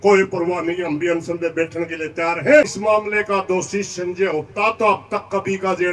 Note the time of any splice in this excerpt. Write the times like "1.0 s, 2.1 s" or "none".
2.7 s

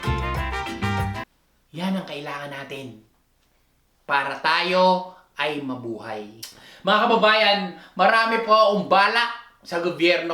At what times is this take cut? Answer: 1.2 s, 6.8 s

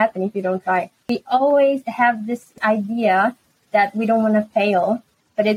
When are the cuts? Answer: 1.0 s, 2.5 s

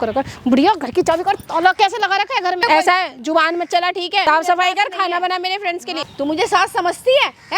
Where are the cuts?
2.7 s, 4.2 s, 6.1 s

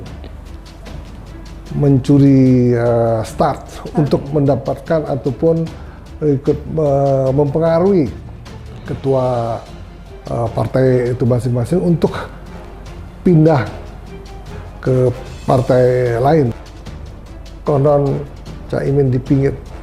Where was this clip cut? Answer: 16.6 s

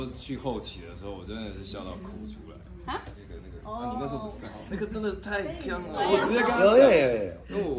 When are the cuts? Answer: 3.2 s, 6.1 s

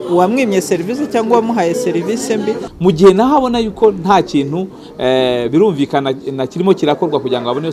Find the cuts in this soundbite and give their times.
2.7 s

